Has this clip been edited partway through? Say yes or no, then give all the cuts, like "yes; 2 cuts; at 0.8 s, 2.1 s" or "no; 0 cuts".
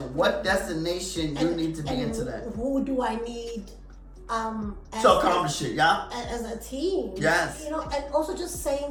no; 0 cuts